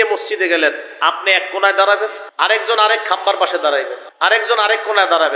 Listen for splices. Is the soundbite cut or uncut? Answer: cut